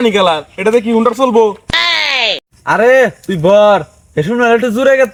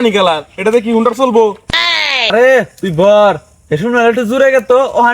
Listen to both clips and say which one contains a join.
second; 1 cut; at 2.3 s

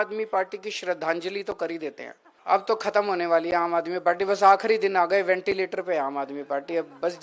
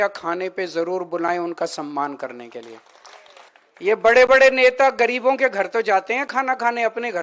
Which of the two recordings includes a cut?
first; 1 cut; at 2.3 s

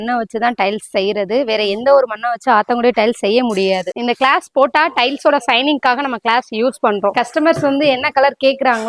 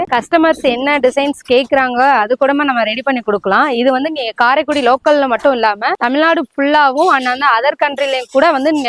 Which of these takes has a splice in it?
first; 2 cuts; at 3.9 s, 7.1 s

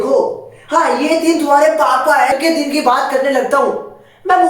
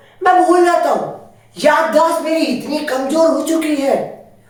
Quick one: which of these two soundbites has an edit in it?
first; 1 cut; at 2.3 s

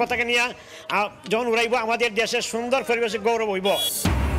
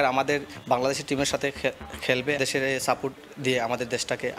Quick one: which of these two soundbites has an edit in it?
second; 1 cut; at 2.4 s

